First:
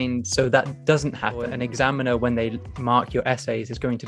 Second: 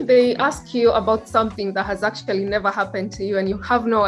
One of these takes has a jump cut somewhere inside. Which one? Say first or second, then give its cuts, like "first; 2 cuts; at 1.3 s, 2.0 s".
first; 1 cut; at 1.5 s